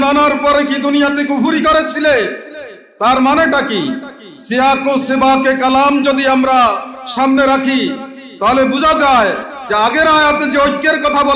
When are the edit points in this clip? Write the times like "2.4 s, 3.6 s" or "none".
none

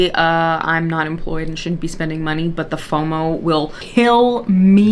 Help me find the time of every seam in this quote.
none

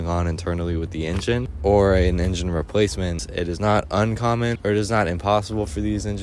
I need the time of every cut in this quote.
1.5 s, 3.2 s, 4.6 s

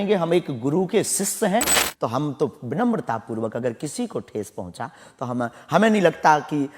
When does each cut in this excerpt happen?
1.8 s

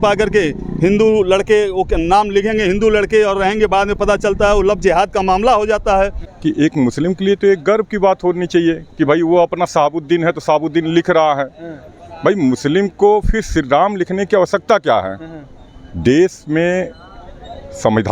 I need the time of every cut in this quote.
6.3 s

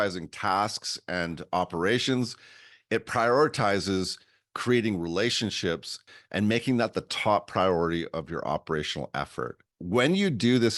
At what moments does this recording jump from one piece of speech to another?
6.0 s, 9.7 s

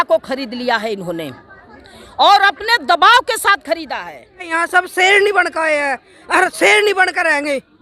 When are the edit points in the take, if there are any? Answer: 4.5 s

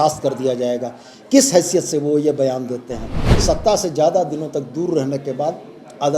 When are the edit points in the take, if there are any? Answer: 3.2 s

